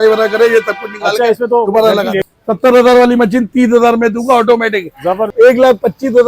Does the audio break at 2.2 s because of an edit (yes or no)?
yes